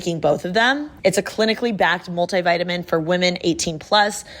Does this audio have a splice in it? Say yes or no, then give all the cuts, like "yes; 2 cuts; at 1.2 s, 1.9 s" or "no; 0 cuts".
yes; 1 cut; at 1.0 s